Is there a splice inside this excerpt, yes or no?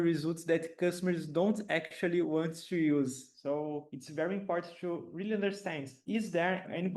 yes